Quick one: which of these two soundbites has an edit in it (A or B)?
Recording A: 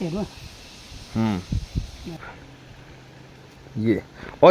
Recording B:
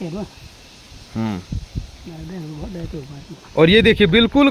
A